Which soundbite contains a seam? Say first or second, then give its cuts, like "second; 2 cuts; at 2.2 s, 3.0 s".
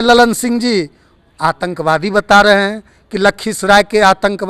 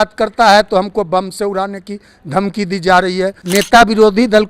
second; 1 cut; at 3.4 s